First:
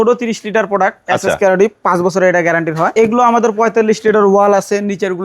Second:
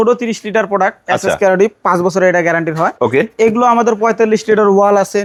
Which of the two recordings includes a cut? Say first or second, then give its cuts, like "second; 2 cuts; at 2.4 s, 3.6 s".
first; 1 cut; at 2.9 s